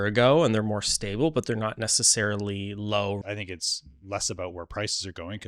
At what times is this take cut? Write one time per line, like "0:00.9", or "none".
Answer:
0:03.2